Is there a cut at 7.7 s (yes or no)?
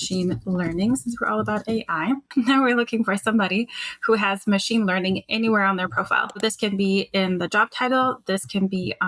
no